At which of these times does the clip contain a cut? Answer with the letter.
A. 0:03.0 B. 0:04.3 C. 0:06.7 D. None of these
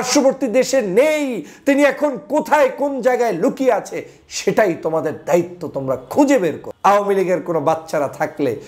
C